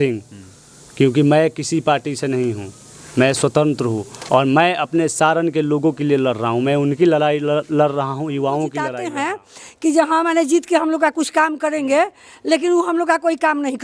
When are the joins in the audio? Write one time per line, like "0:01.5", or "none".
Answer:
0:09.0